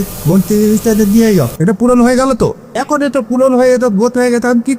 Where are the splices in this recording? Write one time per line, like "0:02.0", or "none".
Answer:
0:01.5
0:02.9